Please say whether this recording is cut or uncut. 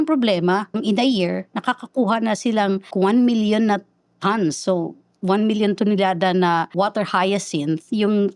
cut